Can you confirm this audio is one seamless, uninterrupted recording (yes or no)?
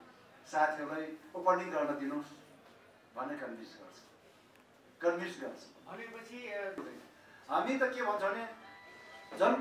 no